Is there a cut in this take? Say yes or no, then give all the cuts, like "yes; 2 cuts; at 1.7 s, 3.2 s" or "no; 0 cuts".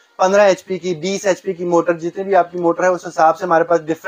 no; 0 cuts